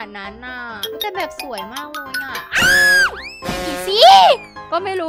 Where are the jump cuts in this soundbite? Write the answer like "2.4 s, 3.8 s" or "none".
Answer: 3.3 s